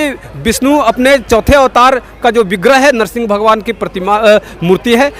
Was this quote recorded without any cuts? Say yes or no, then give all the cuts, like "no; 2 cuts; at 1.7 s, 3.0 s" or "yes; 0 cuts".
yes; 0 cuts